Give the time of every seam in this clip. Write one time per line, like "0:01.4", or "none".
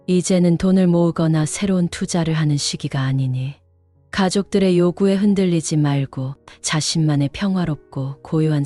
none